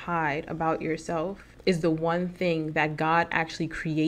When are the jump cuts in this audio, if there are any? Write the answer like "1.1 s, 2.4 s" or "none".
1.4 s